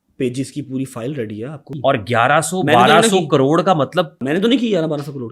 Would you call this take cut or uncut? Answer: cut